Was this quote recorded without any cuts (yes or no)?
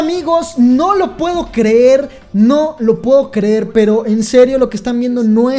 yes